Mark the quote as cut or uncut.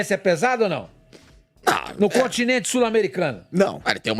uncut